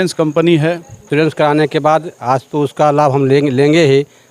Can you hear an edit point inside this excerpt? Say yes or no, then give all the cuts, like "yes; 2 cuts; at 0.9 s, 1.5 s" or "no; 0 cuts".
yes; 1 cut; at 0.9 s